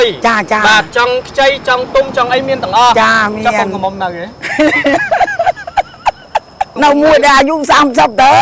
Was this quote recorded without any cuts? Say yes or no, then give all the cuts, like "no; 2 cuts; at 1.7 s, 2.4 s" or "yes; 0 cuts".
no; 1 cut; at 6.7 s